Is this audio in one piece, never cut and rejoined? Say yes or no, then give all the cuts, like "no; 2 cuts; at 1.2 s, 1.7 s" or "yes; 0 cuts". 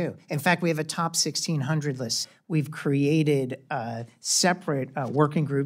no; 1 cut; at 2.2 s